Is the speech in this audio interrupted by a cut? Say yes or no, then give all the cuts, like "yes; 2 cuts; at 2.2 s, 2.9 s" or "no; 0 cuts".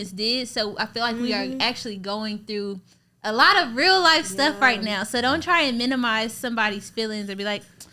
no; 0 cuts